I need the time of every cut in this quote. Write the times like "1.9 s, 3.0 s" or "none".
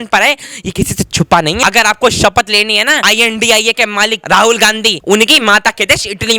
1.6 s, 3.0 s, 4.2 s, 4.9 s

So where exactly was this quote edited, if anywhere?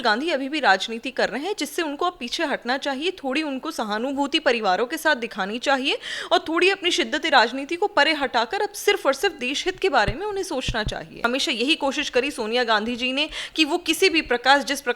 11.2 s

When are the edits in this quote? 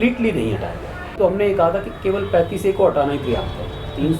1.1 s

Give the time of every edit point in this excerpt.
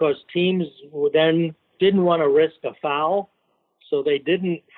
1.6 s

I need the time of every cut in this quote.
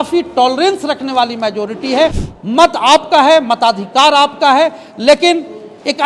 2.3 s

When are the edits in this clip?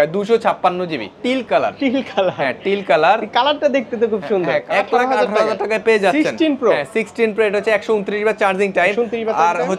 1.1 s, 4.6 s

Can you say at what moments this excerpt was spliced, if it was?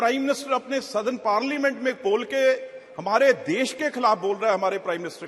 none

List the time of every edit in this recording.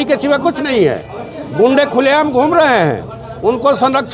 none

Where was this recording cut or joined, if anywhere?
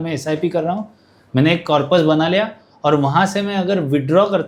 none

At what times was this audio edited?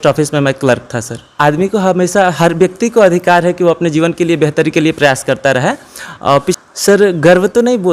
1.2 s, 6.6 s

